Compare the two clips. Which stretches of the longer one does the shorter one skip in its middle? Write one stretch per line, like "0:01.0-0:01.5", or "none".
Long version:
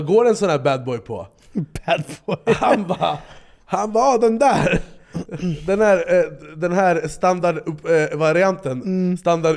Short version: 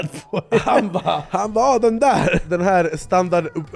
0:03.2-0:03.6
0:04.8-0:06.5